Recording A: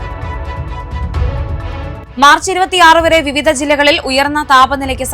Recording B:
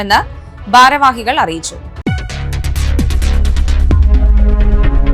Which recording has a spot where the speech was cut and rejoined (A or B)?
A